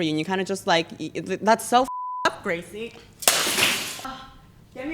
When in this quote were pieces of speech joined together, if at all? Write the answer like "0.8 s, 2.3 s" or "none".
4.0 s